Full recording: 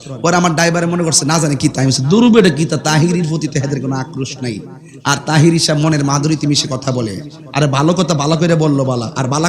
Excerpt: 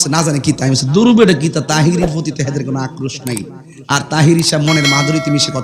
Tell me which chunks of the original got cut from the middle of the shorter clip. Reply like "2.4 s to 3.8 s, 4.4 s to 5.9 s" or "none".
none